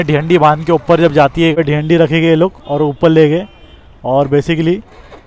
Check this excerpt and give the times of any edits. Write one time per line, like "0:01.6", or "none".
0:01.5